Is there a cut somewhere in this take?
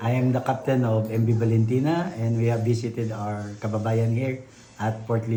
no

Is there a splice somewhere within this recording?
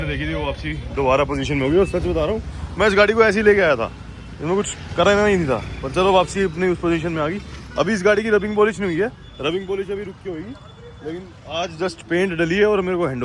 no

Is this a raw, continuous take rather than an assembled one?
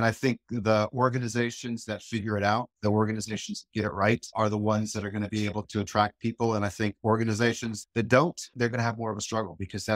yes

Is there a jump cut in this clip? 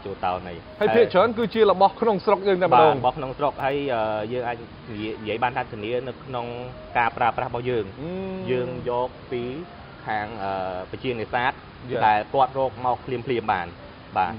no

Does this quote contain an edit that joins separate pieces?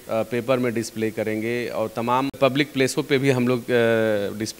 yes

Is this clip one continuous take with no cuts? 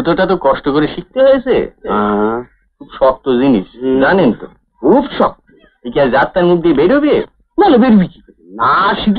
yes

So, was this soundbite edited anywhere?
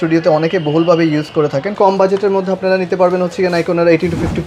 yes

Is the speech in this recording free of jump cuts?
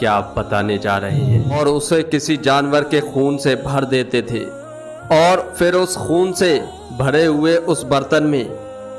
no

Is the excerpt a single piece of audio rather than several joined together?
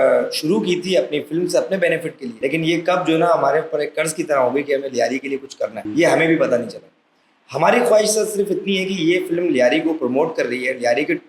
no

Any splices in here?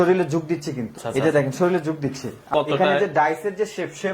yes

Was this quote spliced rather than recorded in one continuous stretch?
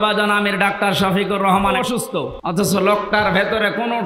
yes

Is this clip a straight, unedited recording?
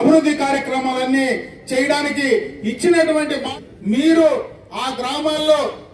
no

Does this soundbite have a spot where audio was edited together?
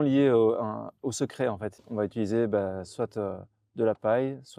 yes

